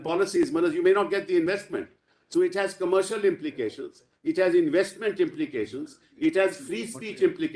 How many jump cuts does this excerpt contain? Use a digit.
0